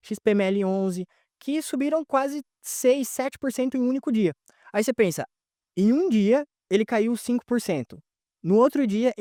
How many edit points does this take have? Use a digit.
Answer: 0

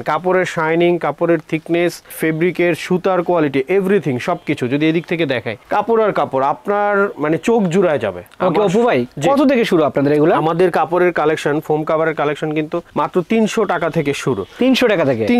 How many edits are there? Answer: 0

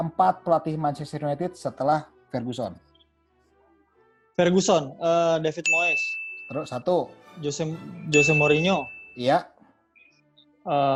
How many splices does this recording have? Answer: 0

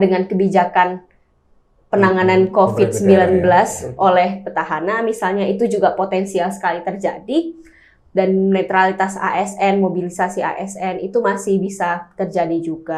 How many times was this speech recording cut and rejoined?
0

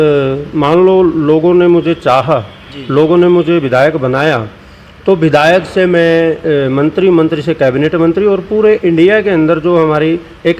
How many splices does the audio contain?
0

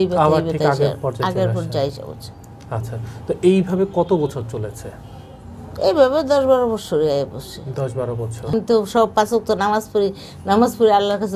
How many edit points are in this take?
1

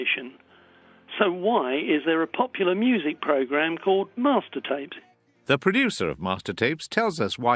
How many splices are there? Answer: 1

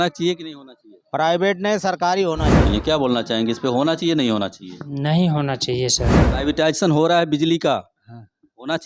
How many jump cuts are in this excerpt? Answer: 2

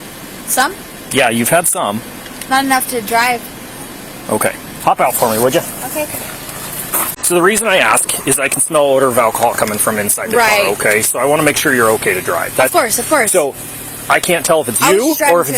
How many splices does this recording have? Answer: 1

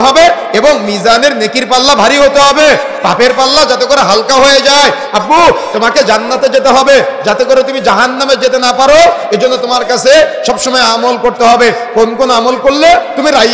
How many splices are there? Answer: 0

